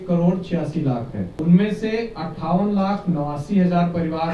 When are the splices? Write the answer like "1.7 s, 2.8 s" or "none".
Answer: 1.3 s